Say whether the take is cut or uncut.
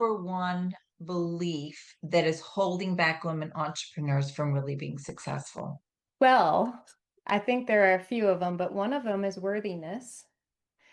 uncut